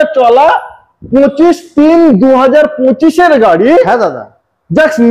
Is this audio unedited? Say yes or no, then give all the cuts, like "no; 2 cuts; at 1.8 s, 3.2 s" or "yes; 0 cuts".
yes; 0 cuts